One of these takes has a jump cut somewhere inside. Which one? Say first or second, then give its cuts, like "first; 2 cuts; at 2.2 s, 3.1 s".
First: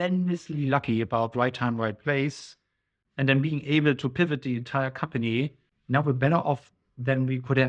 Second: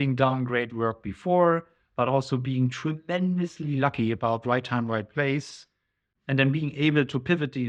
first; 1 cut; at 5.7 s